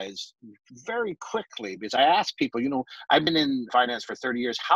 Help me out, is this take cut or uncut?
cut